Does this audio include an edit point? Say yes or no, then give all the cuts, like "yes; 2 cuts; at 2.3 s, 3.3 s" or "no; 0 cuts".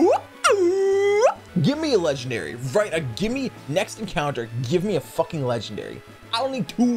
yes; 1 cut; at 1.5 s